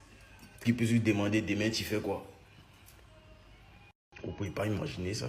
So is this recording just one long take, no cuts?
yes; 0 cuts

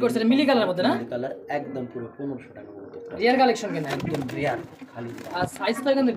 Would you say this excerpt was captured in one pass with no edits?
yes; 0 cuts

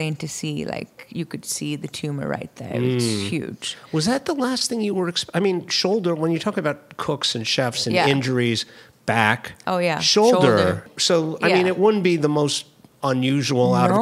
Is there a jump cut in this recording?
yes; 1 cut; at 10.8 s

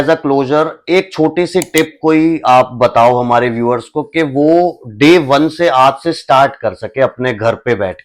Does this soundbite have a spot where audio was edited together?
no; 0 cuts

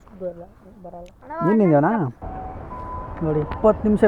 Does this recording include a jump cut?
yes; 1 cut; at 2.2 s

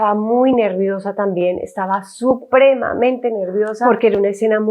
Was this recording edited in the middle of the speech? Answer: yes; 1 cut; at 3.8 s

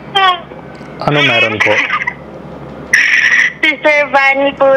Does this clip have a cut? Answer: no; 0 cuts

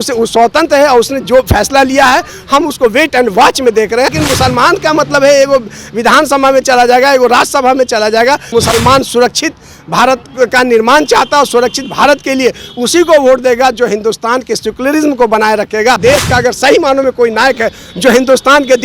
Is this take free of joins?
no; 3 cuts; at 4.1 s, 8.5 s, 16.0 s

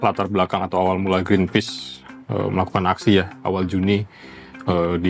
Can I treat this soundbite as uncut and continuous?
yes; 0 cuts

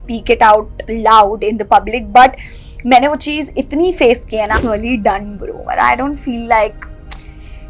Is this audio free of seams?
no; 1 cut; at 4.6 s

